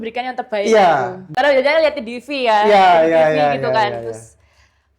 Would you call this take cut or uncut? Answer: cut